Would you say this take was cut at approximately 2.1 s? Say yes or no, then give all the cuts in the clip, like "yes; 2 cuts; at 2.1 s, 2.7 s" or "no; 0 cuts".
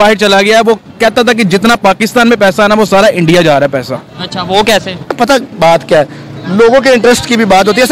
no; 1 cut; at 5.1 s